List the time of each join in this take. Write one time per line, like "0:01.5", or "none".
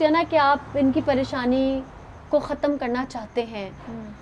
none